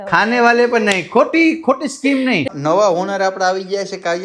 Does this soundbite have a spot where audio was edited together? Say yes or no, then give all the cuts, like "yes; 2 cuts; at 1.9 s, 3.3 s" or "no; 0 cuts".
yes; 1 cut; at 2.4 s